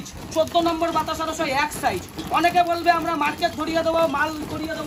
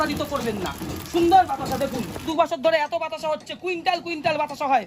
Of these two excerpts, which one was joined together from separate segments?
second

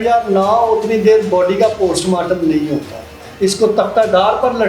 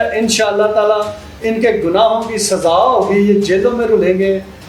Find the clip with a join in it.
first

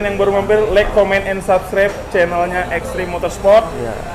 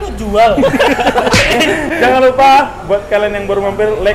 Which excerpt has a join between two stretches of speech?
second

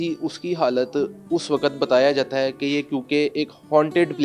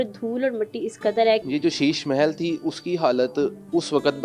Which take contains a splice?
second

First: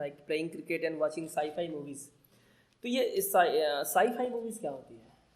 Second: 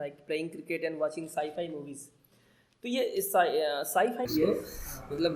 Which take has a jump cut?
second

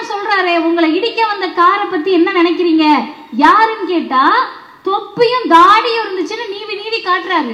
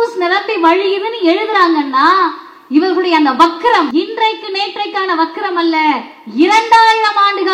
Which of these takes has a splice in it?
second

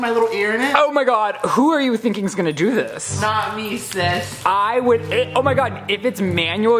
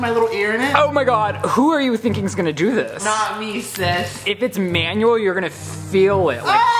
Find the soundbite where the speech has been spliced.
second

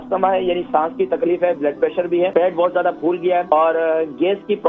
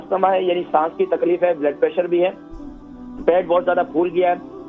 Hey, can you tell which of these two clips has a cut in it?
first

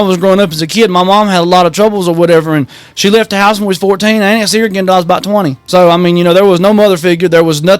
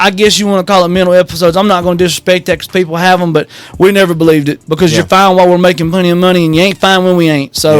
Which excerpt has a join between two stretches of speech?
first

